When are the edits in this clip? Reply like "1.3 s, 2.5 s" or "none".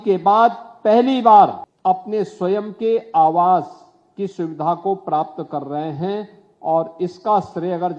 1.7 s